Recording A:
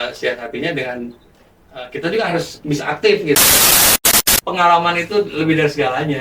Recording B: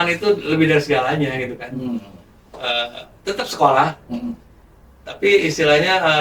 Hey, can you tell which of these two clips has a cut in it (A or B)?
A